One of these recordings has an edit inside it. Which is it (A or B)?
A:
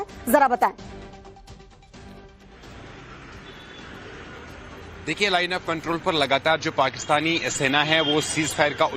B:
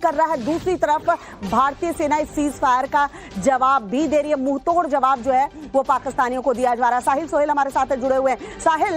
A